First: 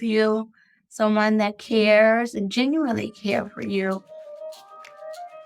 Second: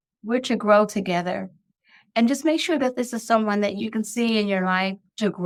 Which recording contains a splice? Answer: first; 1 cut; at 4.6 s

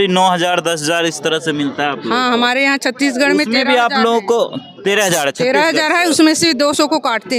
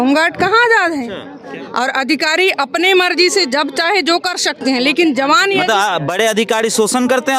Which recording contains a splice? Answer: second; 1 cut; at 1.3 s

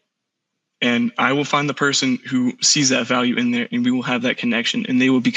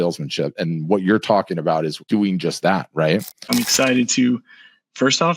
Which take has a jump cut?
second; 2 cuts; at 2.0 s, 3.5 s

